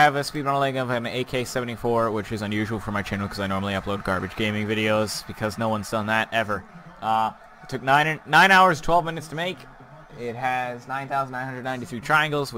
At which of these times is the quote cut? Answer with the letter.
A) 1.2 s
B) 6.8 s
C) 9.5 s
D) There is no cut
D